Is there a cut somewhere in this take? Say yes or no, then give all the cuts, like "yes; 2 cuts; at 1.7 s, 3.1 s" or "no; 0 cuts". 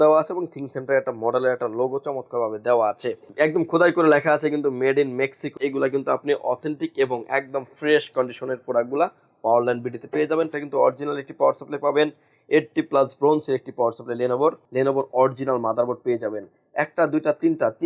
yes; 4 cuts; at 3.2 s, 5.5 s, 10.5 s, 14.6 s